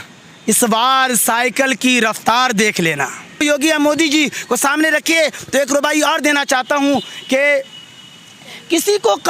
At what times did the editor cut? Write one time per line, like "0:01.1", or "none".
0:03.4